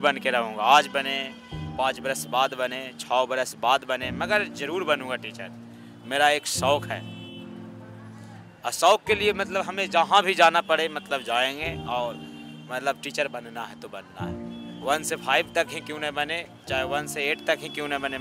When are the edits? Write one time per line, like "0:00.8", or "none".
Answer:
none